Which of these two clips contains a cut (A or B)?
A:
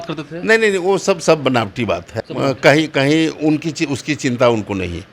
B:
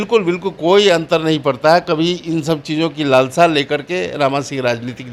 A